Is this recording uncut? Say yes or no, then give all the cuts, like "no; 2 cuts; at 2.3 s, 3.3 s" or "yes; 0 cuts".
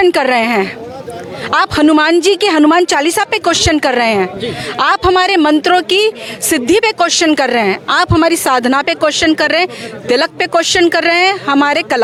yes; 0 cuts